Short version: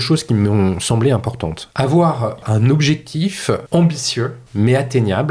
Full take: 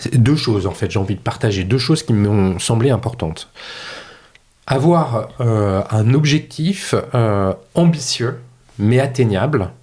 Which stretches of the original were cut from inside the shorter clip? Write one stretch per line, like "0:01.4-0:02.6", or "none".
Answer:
0:03.4-0:04.5
0:05.3-0:05.9
0:07.1-0:07.7
0:08.4-0:08.6